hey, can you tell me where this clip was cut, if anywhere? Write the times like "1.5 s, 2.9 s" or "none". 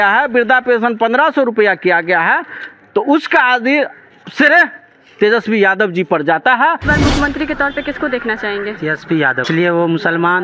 6.8 s, 9.5 s